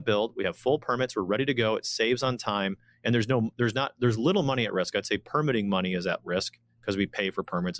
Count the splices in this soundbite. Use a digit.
0